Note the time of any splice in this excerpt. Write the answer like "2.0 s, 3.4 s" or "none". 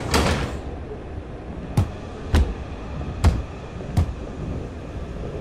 none

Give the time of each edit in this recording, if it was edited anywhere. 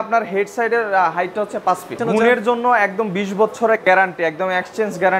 1.9 s

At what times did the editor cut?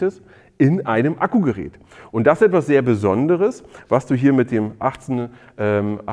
none

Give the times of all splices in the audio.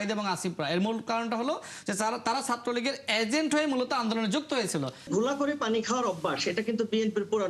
5.1 s

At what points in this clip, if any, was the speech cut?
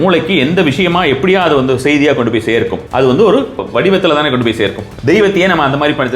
2.8 s, 3.6 s, 4.9 s

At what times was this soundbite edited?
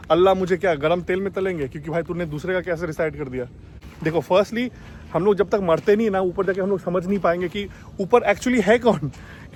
none

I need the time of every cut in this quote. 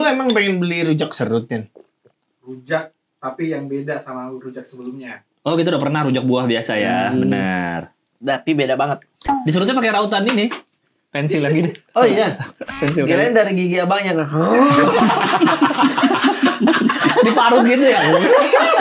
none

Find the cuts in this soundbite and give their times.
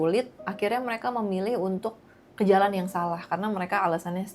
none

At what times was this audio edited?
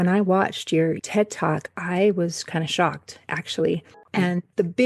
1.0 s, 4.0 s

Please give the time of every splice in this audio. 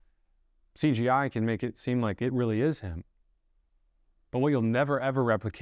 none

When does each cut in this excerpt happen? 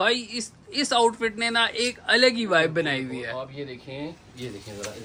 none

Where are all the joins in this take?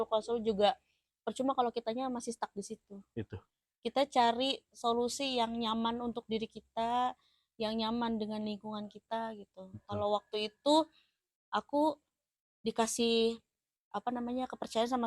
none

